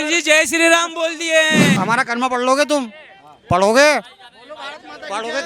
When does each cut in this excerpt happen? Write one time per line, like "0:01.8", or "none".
0:01.8